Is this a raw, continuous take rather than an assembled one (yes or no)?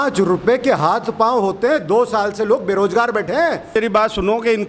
no